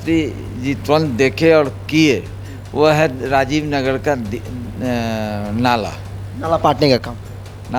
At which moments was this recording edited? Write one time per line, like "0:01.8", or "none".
none